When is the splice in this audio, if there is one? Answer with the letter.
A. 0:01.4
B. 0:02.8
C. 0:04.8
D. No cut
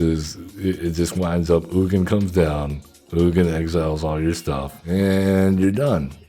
C